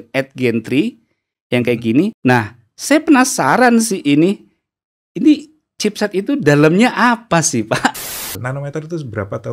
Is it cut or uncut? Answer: cut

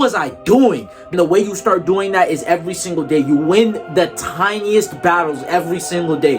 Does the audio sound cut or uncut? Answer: cut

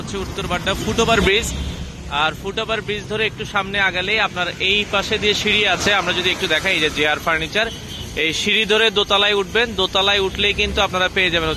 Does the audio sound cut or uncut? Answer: uncut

